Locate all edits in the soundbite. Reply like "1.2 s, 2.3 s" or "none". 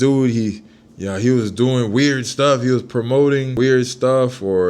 3.5 s